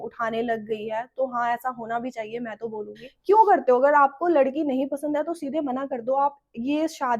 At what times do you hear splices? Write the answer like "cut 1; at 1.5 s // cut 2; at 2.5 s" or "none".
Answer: cut 1; at 3.0 s